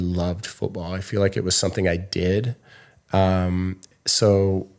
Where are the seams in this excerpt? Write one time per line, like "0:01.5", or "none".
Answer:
none

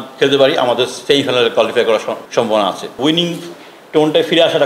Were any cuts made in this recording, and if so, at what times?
0:01.0
0:02.2
0:03.0

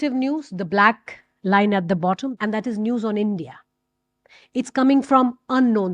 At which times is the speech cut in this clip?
0:02.3

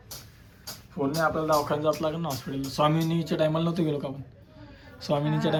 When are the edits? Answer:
none

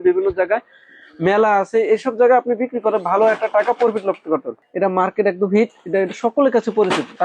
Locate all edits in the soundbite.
0:04.6

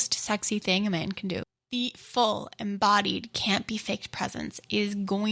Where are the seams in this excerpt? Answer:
0:01.6

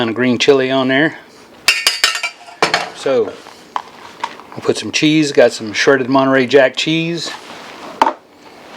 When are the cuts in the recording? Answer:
0:02.9

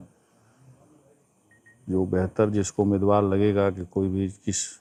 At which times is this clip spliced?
none

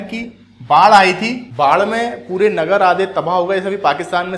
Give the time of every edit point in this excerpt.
0:01.4

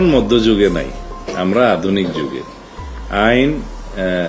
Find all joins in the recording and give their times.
none

